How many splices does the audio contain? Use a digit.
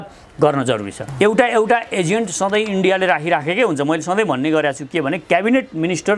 1